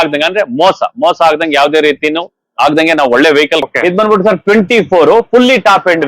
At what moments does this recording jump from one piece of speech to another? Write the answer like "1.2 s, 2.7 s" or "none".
3.7 s